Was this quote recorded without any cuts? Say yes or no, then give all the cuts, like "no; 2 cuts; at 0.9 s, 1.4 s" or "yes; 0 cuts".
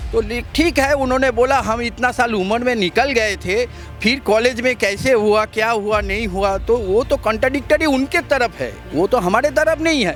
yes; 0 cuts